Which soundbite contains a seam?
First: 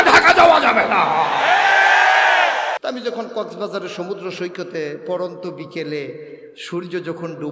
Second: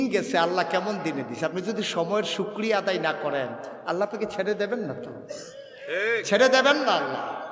first; 1 cut; at 2.8 s

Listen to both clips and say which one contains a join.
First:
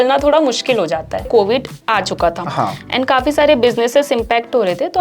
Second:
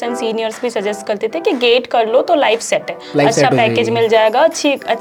first; 1 cut; at 1.3 s

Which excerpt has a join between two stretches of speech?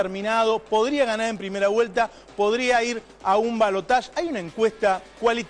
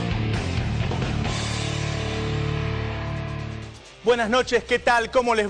first; 1 cut; at 3.8 s

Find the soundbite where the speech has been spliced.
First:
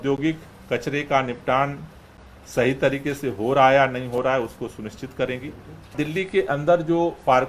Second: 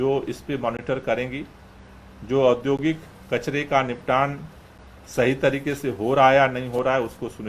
first; 1 cut; at 5.9 s

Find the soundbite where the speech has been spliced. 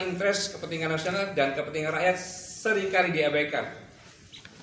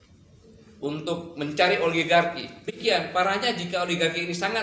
second; 1 cut; at 3.1 s

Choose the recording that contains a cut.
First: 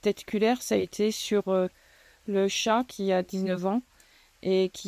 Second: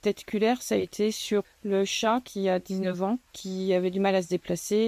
second; 2 cuts; at 1.4 s, 3.4 s

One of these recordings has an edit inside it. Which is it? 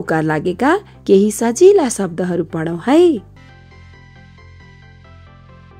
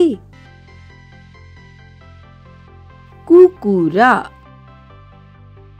first; 1 cut; at 0.9 s

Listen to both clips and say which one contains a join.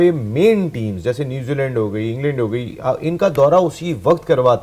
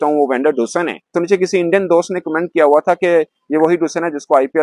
second; 1 cut; at 1.0 s

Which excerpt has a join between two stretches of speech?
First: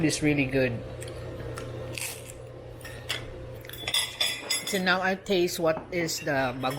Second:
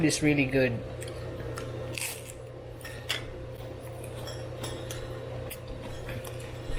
first; 1 cut; at 3.6 s

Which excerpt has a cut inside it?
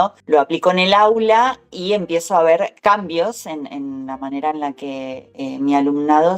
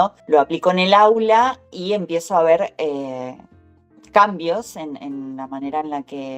first; 2 cuts; at 2.7 s, 5.2 s

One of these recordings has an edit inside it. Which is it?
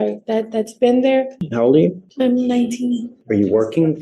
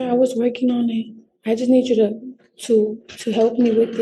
first; 3 cuts; at 1.4 s, 2.0 s, 3.1 s

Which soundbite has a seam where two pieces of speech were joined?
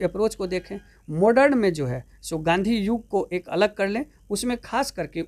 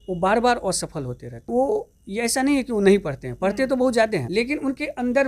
second; 2 cuts; at 1.3 s, 4.3 s

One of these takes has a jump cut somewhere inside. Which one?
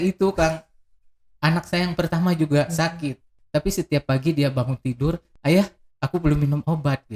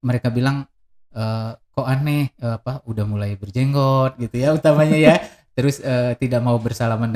first; 2 cuts; at 3.3 s, 5.3 s

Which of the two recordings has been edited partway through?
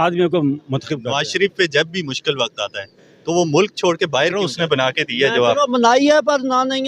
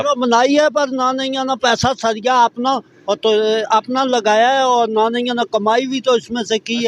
first; 2 cuts; at 1.1 s, 4.4 s

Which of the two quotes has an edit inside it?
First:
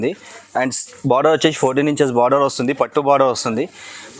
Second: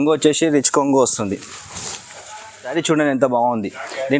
second; 1 cut; at 2.7 s

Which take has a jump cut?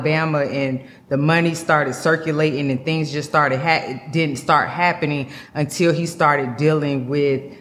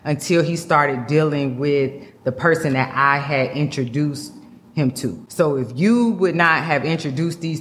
second; 1 cut; at 5.2 s

